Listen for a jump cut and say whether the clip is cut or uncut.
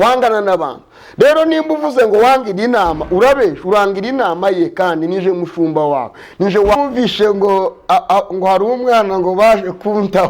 cut